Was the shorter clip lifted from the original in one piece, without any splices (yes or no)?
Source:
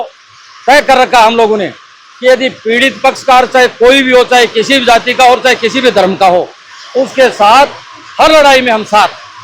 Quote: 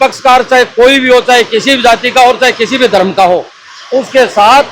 yes